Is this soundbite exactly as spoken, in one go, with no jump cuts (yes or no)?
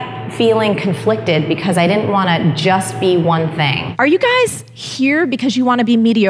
no